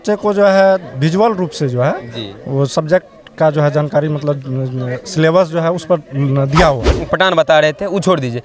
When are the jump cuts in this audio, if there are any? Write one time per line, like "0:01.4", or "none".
0:06.9